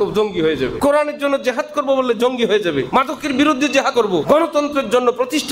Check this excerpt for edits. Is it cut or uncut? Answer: cut